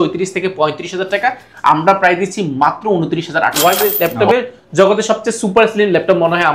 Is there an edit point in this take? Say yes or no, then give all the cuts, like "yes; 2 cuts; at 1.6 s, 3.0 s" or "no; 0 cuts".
yes; 1 cut; at 3.5 s